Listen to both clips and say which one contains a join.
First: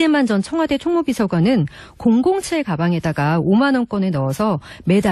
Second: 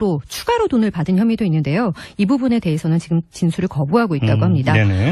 first; 1 cut; at 3.2 s

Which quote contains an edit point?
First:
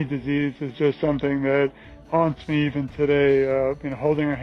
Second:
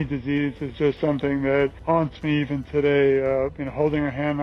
second; 1 cut; at 1.8 s

